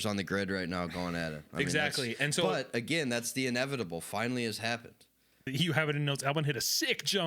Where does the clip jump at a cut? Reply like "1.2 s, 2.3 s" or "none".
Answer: 5.5 s